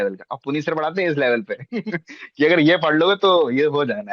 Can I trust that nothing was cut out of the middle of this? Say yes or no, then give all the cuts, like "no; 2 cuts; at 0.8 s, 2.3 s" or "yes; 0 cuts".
yes; 0 cuts